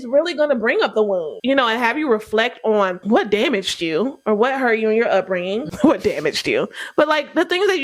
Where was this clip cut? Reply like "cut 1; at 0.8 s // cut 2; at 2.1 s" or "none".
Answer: cut 1; at 1.3 s // cut 2; at 3.0 s